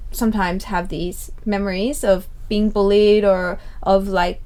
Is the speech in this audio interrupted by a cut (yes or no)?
no